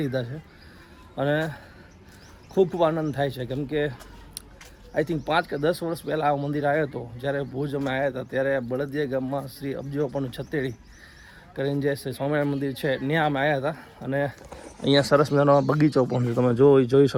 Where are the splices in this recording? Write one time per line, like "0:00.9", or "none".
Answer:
none